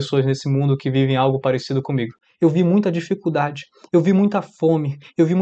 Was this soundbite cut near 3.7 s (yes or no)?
no